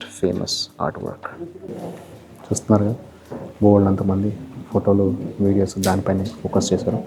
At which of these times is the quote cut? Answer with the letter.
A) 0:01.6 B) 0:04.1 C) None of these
C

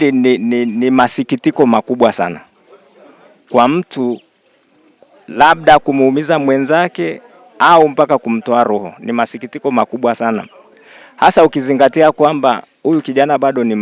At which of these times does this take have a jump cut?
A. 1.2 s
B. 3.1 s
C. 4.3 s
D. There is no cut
D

